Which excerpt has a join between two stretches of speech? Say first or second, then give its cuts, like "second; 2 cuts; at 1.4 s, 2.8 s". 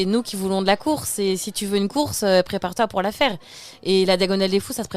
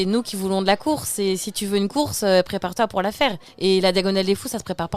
second; 1 cut; at 3.5 s